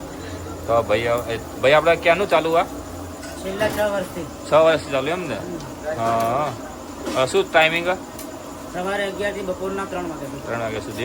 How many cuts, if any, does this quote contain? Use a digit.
0